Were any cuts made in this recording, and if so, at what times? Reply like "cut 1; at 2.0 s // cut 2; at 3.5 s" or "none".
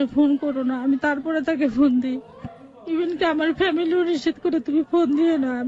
none